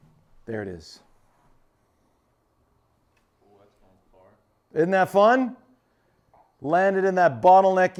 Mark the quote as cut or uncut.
uncut